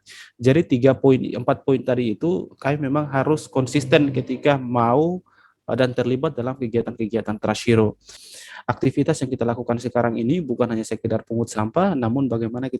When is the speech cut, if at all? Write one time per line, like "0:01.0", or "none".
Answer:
0:08.2